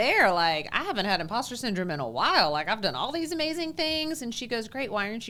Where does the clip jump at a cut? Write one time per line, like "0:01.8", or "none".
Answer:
none